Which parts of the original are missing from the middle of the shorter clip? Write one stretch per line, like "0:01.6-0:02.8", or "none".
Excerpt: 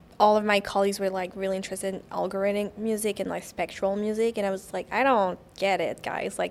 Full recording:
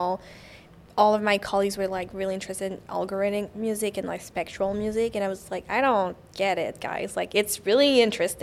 none